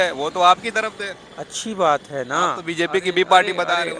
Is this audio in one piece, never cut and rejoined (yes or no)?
yes